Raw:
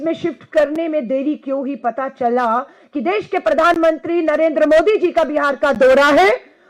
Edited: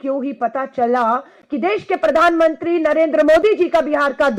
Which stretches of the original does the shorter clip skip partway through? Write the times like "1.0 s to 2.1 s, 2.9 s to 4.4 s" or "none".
none